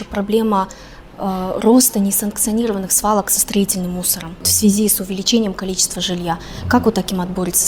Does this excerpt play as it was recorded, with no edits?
yes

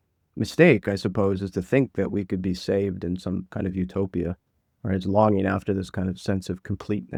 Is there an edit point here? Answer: no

